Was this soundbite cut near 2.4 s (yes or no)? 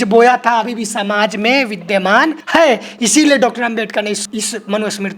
yes